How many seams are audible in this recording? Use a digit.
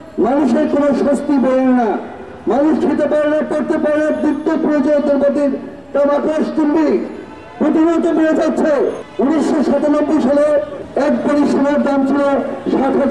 2